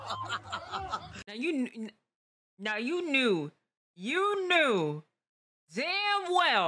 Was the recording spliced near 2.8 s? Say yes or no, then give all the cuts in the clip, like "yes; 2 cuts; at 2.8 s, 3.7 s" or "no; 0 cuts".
no; 1 cut; at 1.2 s